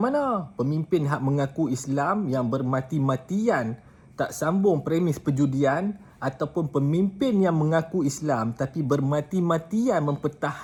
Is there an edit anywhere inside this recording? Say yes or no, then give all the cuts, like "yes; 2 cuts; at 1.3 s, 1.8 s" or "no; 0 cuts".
no; 0 cuts